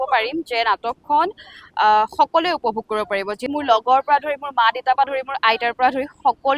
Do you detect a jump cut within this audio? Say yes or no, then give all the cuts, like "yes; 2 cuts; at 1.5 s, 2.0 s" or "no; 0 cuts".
yes; 1 cut; at 3.4 s